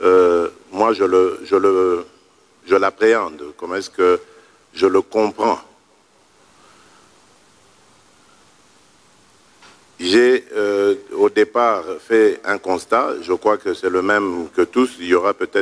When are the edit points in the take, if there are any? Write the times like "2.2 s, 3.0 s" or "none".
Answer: none